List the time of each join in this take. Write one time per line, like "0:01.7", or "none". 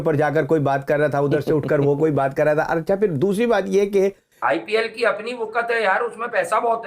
0:04.3